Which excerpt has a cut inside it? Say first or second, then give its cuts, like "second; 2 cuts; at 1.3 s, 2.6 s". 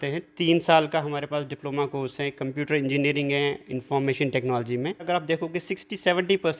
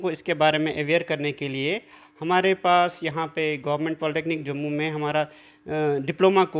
first; 1 cut; at 5.1 s